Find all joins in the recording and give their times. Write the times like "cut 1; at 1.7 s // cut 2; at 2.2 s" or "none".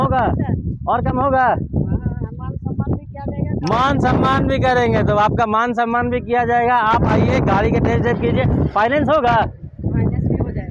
none